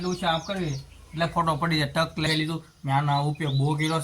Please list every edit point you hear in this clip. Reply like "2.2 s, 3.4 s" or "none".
2.2 s